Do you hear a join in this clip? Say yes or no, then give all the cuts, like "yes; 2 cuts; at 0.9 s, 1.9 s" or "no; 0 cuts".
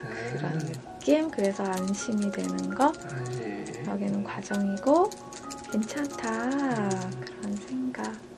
no; 0 cuts